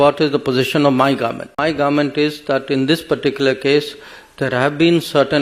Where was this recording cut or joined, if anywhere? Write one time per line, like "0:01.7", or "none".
0:01.6